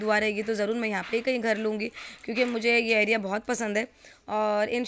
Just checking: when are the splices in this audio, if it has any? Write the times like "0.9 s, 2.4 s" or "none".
none